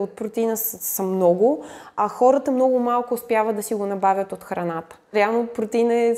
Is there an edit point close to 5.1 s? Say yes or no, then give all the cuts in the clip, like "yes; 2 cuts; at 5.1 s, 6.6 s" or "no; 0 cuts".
yes; 1 cut; at 5.1 s